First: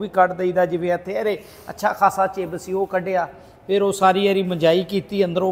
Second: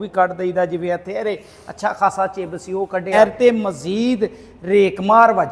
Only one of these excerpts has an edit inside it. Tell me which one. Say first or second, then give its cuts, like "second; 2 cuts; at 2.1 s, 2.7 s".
second; 1 cut; at 3.1 s